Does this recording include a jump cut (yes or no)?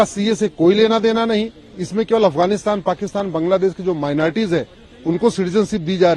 no